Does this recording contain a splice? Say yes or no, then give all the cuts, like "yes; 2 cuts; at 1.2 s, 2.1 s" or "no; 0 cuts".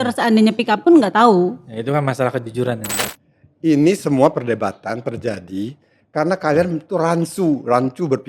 yes; 1 cut; at 3.1 s